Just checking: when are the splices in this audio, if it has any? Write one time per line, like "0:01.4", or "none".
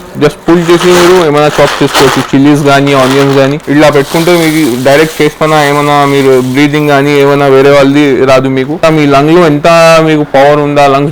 0:03.6
0:08.8